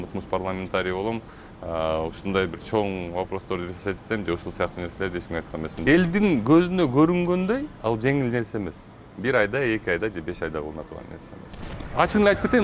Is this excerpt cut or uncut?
cut